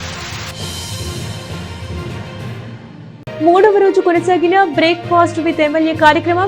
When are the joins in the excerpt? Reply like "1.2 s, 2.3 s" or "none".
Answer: 2.8 s